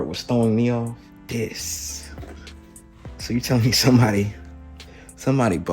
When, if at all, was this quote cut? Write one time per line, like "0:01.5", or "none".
0:01.1